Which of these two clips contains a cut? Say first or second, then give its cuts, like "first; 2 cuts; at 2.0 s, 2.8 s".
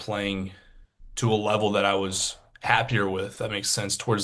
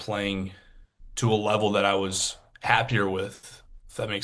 first; 1 cut; at 3.3 s